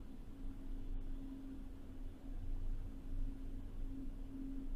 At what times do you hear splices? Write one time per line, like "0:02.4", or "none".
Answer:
none